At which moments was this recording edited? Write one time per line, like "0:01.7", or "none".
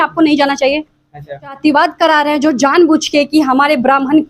0:01.6